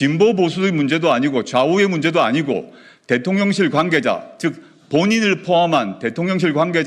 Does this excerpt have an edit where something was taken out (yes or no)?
no